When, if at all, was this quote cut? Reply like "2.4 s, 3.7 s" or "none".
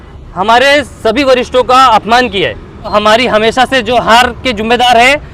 2.9 s